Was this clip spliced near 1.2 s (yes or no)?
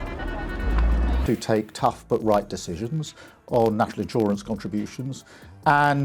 yes